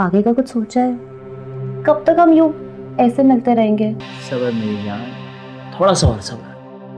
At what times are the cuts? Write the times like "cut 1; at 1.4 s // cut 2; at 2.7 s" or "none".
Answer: cut 1; at 4.1 s